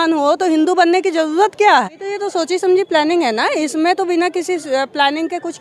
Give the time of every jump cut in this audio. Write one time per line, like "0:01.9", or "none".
0:02.0